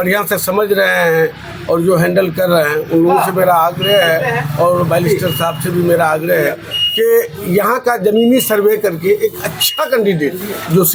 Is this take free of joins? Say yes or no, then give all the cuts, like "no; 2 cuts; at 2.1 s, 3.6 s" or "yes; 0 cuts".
yes; 0 cuts